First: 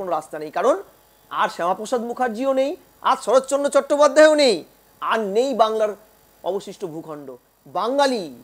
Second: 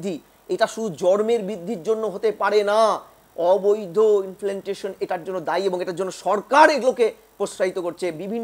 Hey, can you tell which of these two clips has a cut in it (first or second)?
first